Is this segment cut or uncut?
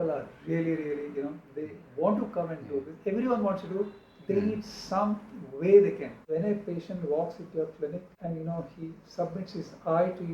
cut